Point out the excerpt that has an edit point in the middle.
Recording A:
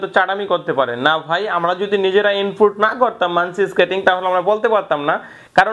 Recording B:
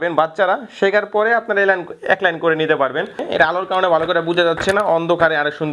B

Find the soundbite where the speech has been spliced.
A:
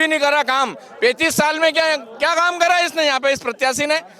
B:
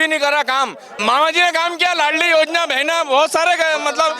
B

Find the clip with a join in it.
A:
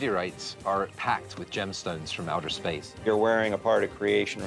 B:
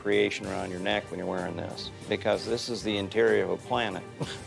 A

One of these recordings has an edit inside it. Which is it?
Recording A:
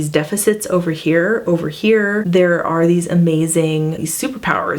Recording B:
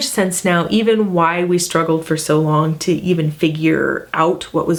A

